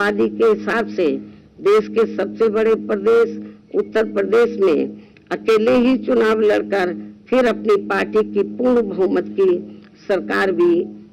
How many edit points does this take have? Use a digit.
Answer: 0